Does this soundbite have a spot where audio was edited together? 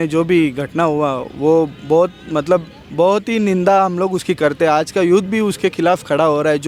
no; 0 cuts

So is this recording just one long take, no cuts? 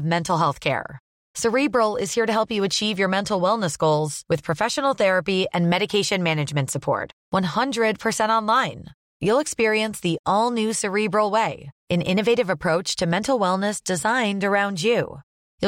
yes; 0 cuts

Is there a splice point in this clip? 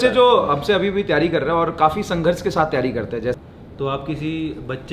yes; 1 cut; at 3.4 s

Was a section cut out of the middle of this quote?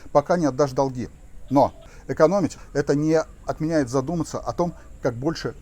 yes; 1 cut; at 2.4 s

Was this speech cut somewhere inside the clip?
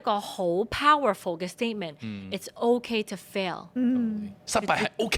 no; 0 cuts

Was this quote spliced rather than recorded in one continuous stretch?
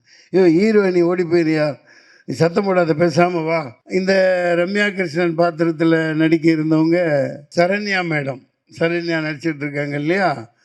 yes; 2 cuts; at 3.8 s, 7.4 s

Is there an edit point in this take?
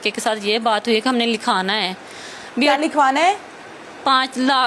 no; 0 cuts

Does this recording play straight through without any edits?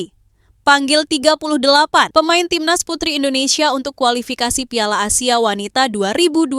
yes; 0 cuts

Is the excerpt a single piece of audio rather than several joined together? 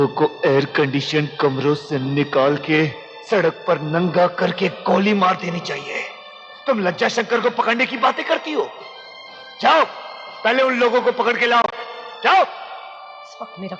yes; 0 cuts

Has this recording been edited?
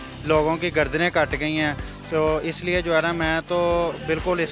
no; 0 cuts

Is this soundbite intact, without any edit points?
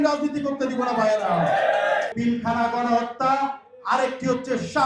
no; 1 cut; at 2.1 s

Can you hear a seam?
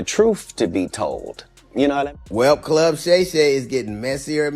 yes; 1 cut; at 2.1 s

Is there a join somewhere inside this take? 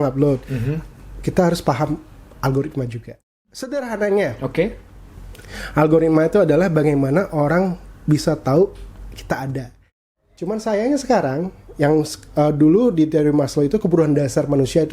yes; 2 cuts; at 3.2 s, 9.9 s

